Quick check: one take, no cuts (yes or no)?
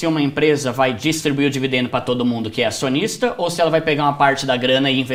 yes